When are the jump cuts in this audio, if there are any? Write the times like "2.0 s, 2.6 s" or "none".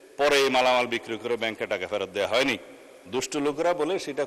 none